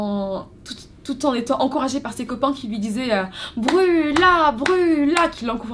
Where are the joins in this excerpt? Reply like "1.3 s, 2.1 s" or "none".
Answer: none